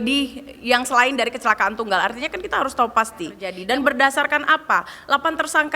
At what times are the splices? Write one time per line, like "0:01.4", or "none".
0:03.5